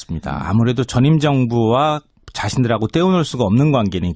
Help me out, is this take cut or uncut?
cut